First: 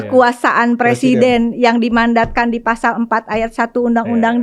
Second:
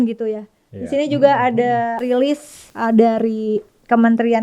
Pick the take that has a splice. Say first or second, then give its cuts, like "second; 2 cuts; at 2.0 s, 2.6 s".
second; 1 cut; at 2.1 s